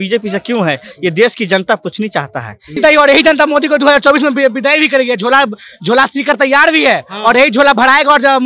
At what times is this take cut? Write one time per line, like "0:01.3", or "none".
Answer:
0:02.8